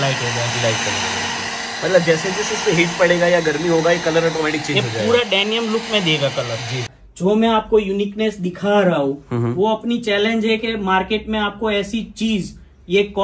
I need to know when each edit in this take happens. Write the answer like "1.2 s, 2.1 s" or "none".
7.0 s